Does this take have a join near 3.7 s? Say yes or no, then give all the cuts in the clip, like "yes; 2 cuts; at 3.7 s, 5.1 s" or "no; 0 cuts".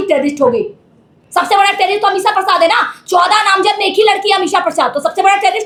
no; 0 cuts